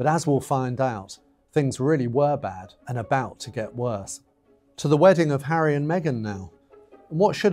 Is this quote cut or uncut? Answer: cut